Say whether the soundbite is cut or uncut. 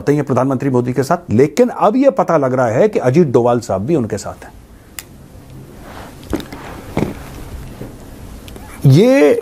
uncut